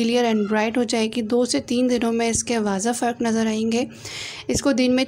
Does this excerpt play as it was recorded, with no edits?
yes; 0 cuts

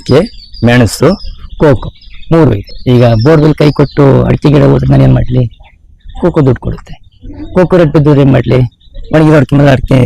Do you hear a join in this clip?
yes; 1 cut; at 2.7 s

